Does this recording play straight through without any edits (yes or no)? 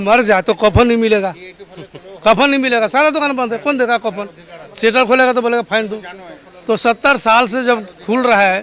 yes